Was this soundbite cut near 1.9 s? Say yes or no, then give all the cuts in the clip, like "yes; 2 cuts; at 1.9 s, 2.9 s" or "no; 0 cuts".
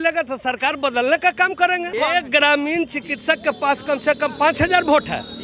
yes; 1 cut; at 1.9 s